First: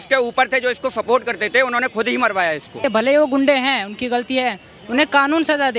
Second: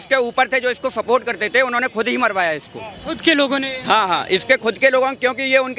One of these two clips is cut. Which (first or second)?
first